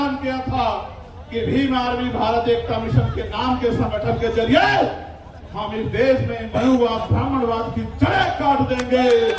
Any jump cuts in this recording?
no; 0 cuts

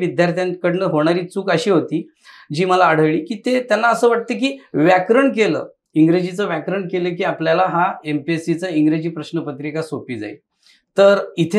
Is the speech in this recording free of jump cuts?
yes; 0 cuts

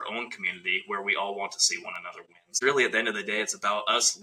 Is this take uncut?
no; 1 cut; at 2.5 s

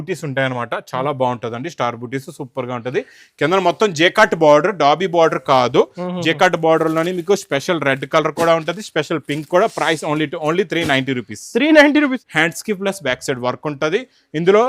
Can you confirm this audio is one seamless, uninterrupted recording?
no; 1 cut; at 12.2 s

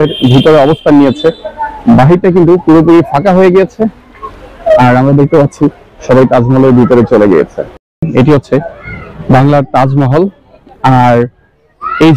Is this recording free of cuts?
no; 1 cut; at 7.9 s

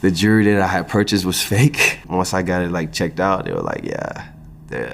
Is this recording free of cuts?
no; 1 cut; at 2.0 s

